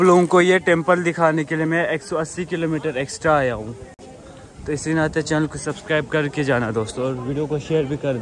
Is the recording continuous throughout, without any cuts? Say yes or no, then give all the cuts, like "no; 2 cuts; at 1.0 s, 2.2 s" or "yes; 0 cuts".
yes; 0 cuts